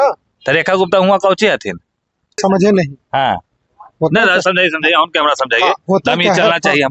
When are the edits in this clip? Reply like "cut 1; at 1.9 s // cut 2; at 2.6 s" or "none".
cut 1; at 2.4 s